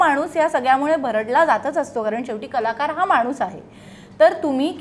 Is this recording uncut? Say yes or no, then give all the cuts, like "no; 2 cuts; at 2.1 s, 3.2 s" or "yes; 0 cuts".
yes; 0 cuts